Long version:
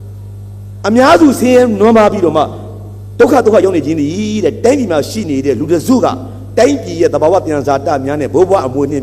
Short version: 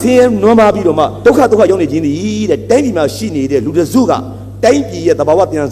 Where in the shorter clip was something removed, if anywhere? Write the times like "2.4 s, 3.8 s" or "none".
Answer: 1.1 s